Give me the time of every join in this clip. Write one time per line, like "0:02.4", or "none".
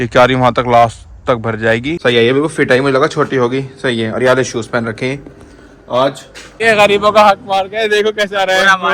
0:02.0
0:06.6